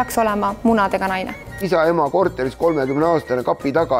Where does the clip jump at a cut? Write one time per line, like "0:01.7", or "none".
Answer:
0:01.6